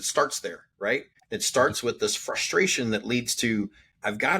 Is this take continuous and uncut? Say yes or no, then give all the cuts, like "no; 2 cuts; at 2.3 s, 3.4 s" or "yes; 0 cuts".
no; 1 cut; at 1.2 s